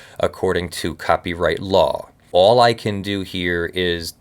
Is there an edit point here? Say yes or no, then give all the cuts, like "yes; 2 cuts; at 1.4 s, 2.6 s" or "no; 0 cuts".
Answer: yes; 1 cut; at 2.3 s